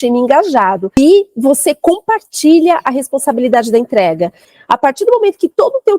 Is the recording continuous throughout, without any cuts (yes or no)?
no